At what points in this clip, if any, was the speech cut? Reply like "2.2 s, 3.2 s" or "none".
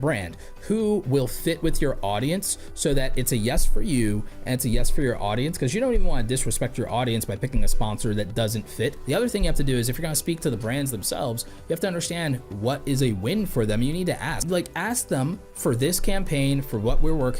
8.9 s, 14.4 s

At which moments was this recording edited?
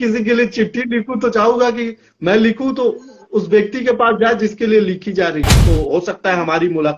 5.6 s

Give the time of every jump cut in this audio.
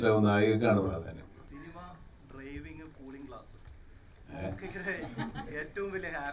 1.4 s

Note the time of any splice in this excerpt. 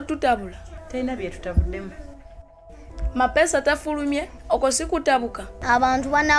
5.5 s

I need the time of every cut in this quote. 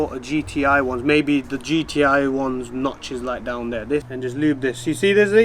4.1 s

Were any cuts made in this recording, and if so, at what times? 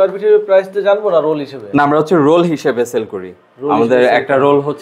none

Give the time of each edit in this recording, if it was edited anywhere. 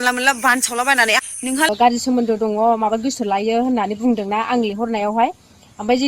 1.7 s

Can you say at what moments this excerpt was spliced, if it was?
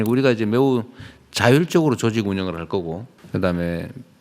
3.1 s

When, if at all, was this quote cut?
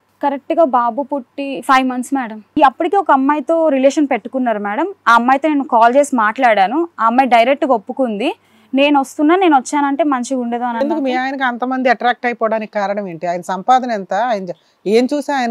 2.5 s

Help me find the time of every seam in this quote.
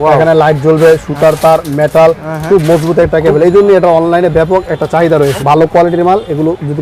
5.4 s

